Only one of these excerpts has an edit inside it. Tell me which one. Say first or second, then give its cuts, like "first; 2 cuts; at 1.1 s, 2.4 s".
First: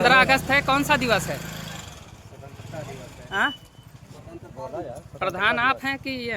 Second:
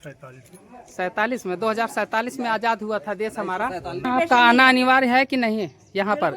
second; 1 cut; at 4.1 s